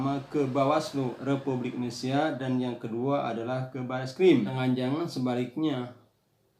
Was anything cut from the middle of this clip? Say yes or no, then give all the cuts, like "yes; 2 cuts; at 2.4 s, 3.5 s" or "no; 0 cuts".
yes; 1 cut; at 4.6 s